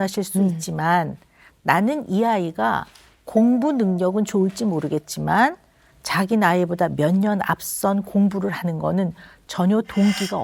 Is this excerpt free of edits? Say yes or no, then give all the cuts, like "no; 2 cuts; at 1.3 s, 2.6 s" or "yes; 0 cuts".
yes; 0 cuts